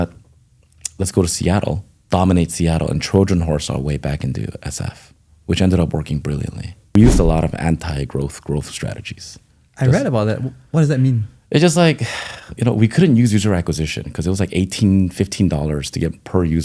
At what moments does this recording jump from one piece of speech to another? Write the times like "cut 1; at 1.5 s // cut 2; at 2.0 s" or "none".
cut 1; at 1.9 s // cut 2; at 6.9 s